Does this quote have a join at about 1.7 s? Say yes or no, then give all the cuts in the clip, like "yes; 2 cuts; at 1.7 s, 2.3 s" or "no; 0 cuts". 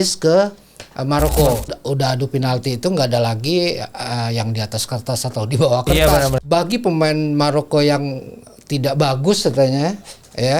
yes; 2 cuts; at 1.7 s, 6.3 s